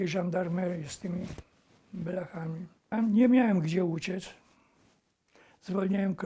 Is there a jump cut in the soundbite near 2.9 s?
yes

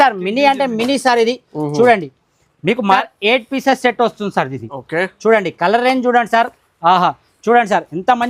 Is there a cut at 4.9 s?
no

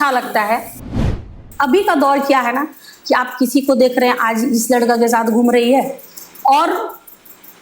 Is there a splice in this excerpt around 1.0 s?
yes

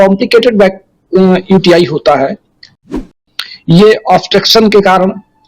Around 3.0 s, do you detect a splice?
yes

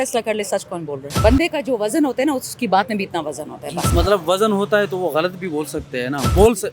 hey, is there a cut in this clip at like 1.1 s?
yes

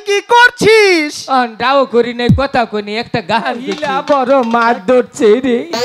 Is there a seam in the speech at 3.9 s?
yes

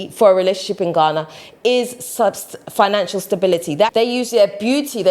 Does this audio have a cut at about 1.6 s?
no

